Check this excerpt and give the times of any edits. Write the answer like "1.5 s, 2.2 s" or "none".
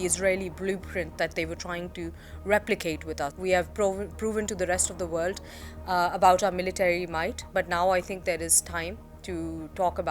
3.3 s